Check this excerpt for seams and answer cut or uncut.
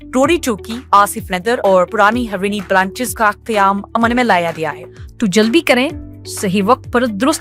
cut